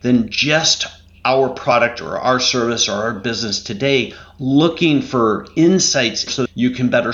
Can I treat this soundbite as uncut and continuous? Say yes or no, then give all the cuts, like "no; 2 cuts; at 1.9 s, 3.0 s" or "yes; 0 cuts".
no; 1 cut; at 6.2 s